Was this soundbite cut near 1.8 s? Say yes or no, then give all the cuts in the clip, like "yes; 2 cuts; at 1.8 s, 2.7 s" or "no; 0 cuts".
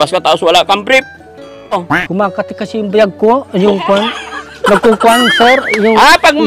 yes; 1 cut; at 1.8 s